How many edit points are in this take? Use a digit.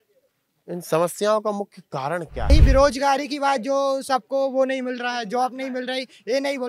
1